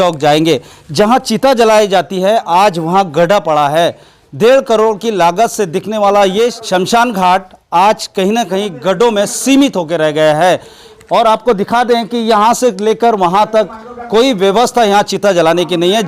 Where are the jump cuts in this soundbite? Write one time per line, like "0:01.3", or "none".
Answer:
0:06.6